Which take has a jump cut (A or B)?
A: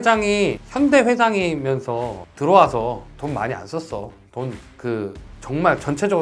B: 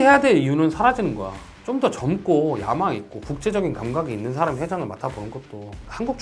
B